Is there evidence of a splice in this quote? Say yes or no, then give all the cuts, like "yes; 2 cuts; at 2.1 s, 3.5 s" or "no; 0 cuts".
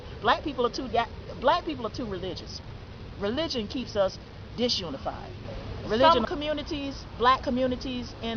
yes; 1 cut; at 6.0 s